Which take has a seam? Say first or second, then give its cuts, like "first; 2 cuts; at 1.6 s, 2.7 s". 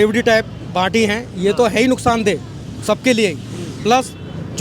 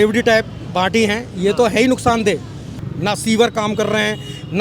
second; 1 cut; at 2.7 s